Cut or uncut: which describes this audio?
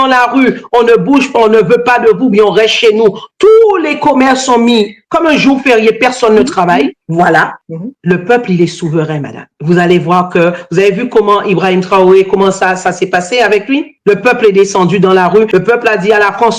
cut